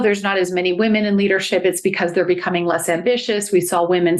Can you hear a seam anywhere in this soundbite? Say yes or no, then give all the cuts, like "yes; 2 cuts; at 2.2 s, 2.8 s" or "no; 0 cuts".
no; 0 cuts